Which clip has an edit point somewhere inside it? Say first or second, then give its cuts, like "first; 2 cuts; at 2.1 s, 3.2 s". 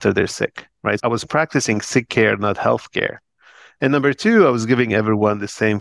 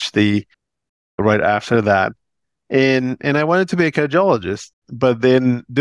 first; 1 cut; at 1.0 s